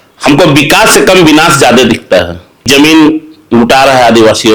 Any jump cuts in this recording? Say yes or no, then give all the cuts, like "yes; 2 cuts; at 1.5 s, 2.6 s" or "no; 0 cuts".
yes; 1 cut; at 2.7 s